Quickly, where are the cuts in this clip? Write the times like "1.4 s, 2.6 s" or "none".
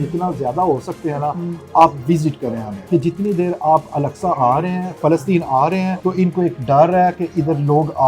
2.7 s, 6.0 s